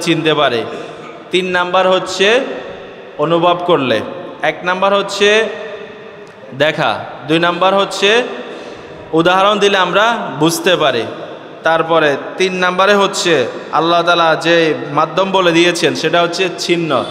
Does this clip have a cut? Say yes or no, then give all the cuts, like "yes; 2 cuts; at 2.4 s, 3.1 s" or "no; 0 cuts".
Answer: no; 0 cuts